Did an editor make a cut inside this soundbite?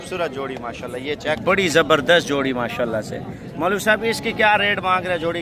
yes; 1 cut; at 1.4 s

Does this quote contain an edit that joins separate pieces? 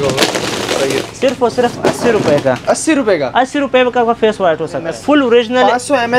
yes; 1 cut; at 4.9 s

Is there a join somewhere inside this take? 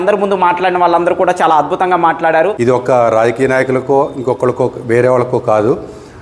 yes; 1 cut; at 2.5 s

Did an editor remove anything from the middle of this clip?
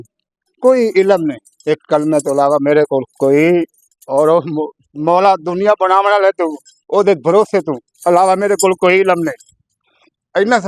no; 0 cuts

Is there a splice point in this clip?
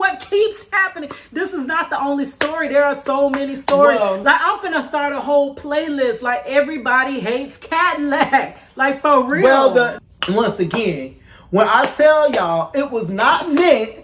yes; 1 cut; at 9.9 s

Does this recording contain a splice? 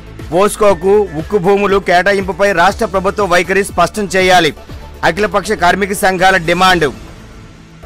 no; 0 cuts

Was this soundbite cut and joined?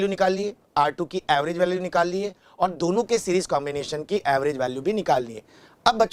no; 0 cuts

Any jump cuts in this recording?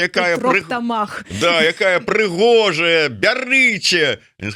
no; 0 cuts

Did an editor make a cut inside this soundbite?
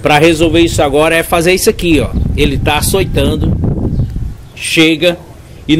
no; 0 cuts

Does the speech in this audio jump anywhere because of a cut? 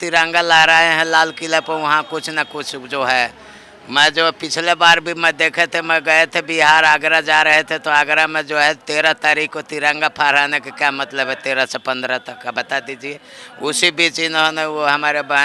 no; 0 cuts

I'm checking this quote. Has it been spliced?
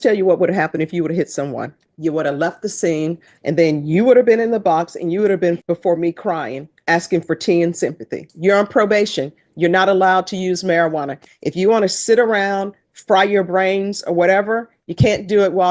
yes; 4 cuts; at 1.8 s, 3.3 s, 5.6 s, 8.2 s

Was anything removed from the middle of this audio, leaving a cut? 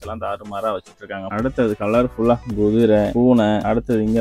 yes; 2 cuts; at 1.2 s, 3.2 s

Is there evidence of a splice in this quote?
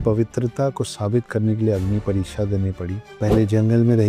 no; 0 cuts

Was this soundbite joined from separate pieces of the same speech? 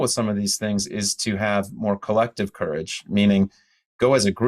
no; 0 cuts

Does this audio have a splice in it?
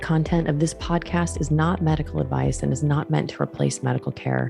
no; 0 cuts

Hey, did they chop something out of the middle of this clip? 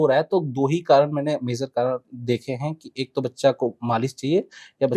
no; 0 cuts

